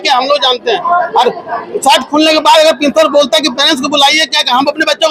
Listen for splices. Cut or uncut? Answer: uncut